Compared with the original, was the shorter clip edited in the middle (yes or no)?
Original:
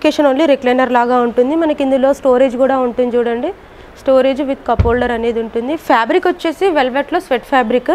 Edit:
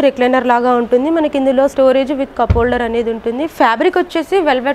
yes